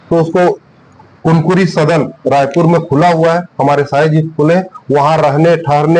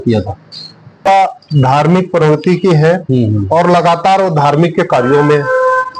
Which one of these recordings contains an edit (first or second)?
second